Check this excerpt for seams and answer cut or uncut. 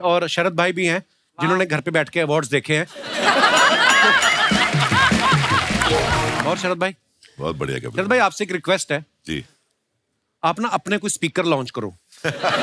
cut